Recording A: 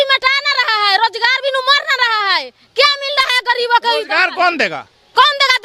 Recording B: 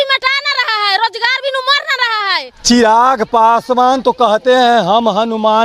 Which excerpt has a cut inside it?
B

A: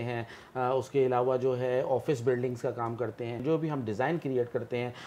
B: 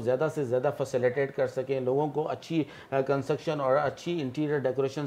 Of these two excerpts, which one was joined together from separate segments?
A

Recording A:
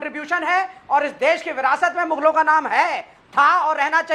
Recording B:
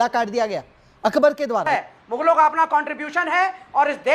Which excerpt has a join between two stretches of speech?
B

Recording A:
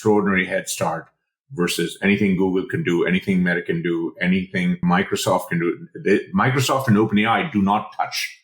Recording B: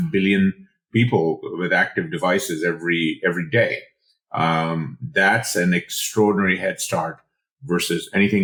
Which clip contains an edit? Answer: A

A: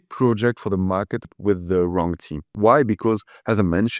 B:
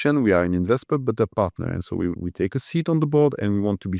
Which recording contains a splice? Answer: A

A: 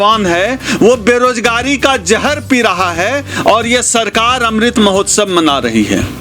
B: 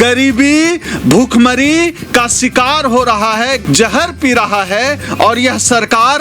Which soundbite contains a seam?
B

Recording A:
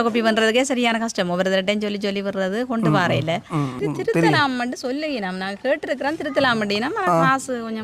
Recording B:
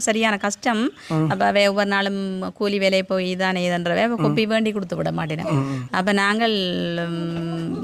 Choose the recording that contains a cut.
A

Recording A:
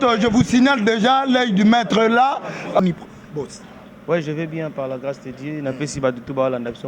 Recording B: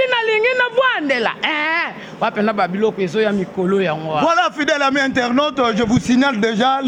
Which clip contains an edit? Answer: A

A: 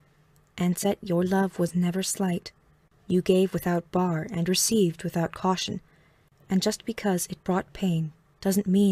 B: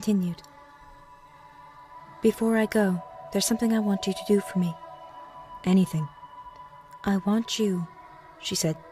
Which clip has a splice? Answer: B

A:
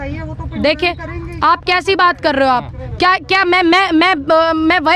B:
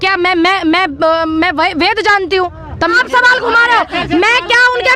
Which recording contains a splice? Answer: B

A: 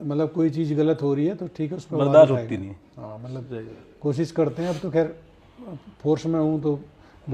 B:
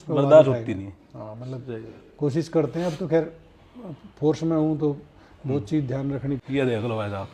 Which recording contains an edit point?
B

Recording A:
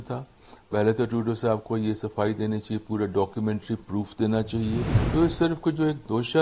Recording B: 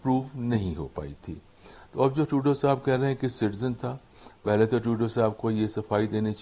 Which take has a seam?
A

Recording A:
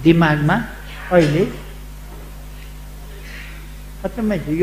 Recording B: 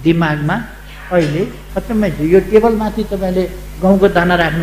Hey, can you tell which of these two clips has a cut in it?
B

